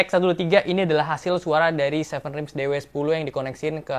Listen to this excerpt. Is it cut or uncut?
uncut